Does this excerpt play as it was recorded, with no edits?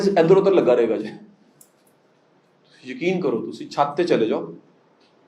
yes; 0 cuts

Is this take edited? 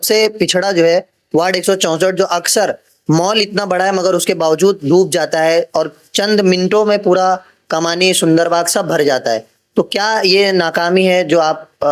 no; 0 cuts

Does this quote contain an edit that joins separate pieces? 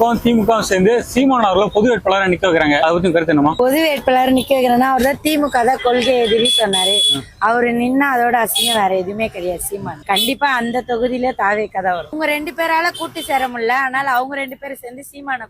yes; 3 cuts; at 2.8 s, 10.0 s, 12.1 s

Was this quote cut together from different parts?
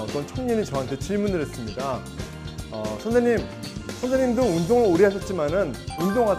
no; 0 cuts

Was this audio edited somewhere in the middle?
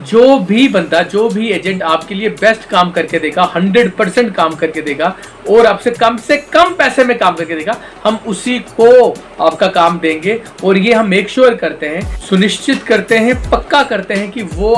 yes; 1 cut; at 12.2 s

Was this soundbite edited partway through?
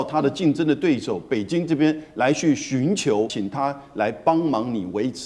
yes; 1 cut; at 3.4 s

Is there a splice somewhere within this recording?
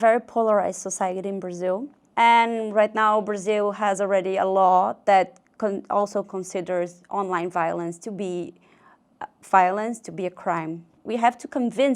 yes; 2 cuts; at 2.0 s, 11.0 s

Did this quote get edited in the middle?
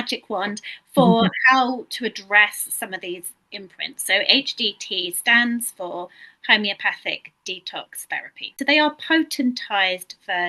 yes; 1 cut; at 8.5 s

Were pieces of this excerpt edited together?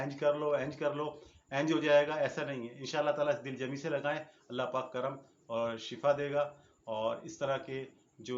no; 0 cuts

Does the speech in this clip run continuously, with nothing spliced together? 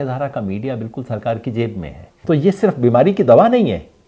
no; 1 cut; at 2.2 s

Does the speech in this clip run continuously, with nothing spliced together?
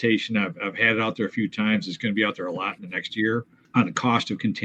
no; 1 cut; at 3.6 s

